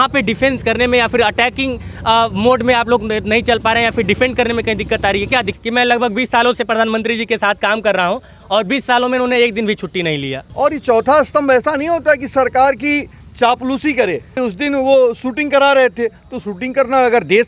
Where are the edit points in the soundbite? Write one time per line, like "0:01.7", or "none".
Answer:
0:05.5
0:10.4
0:14.4